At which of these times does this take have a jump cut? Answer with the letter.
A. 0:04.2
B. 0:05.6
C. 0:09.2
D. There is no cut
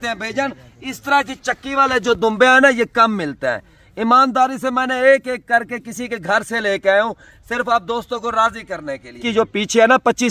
C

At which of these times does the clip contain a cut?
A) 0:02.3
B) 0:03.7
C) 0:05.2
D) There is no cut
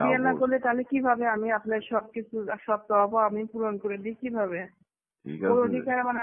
D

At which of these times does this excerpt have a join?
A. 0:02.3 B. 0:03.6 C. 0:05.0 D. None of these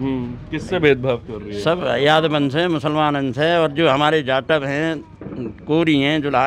D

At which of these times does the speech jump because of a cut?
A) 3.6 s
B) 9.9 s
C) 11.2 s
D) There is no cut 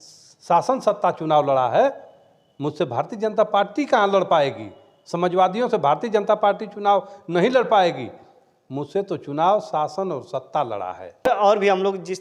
C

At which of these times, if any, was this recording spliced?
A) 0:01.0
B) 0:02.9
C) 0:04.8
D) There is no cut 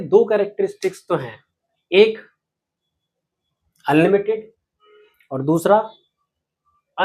D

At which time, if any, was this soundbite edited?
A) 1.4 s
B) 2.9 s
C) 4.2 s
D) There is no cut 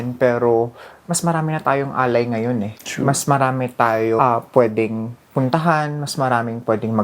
C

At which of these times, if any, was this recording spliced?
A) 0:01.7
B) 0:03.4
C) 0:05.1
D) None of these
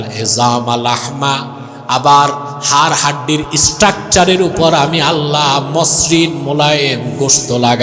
D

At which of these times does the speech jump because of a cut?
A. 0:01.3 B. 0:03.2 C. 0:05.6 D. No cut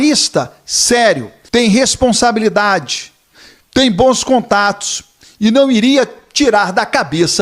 A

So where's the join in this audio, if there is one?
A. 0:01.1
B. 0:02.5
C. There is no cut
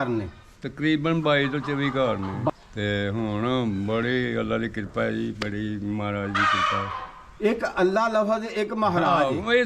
B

